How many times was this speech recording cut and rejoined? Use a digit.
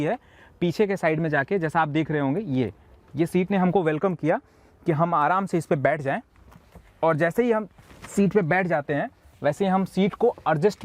0